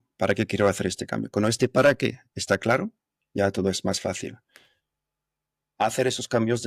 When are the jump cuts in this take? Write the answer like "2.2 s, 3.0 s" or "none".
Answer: none